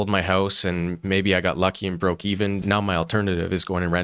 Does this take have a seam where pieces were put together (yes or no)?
yes